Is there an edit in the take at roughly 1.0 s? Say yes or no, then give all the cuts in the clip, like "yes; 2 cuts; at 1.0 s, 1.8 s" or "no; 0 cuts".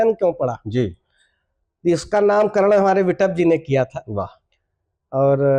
no; 0 cuts